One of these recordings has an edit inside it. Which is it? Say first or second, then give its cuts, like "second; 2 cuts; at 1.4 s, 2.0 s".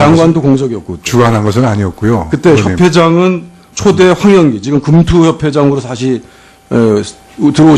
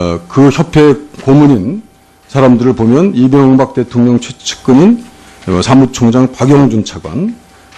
second; 1 cut; at 3.2 s